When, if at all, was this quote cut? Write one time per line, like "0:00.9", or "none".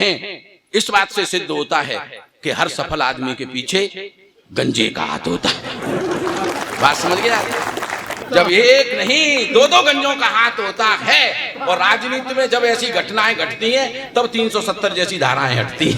0:08.2